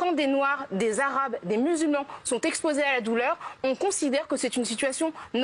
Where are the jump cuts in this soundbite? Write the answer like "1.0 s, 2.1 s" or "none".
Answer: none